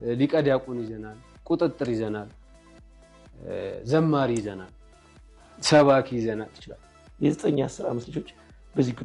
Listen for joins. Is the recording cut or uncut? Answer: cut